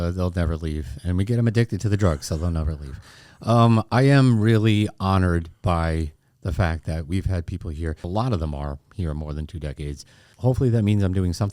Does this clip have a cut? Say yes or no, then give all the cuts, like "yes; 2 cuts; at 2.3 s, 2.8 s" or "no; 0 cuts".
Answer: yes; 2 cuts; at 8.0 s, 10.3 s